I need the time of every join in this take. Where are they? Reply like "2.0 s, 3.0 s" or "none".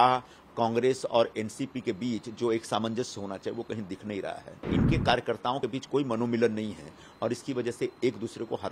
4.7 s